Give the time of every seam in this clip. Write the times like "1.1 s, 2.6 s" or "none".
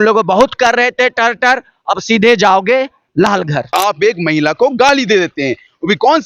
3.7 s